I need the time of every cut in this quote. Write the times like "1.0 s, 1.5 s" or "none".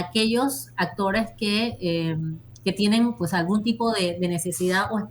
none